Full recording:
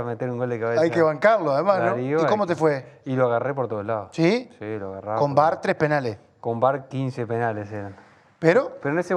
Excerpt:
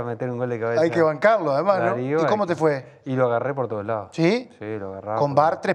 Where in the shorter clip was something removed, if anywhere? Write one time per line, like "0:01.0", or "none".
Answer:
none